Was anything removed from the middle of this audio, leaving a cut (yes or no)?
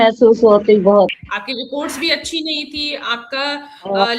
yes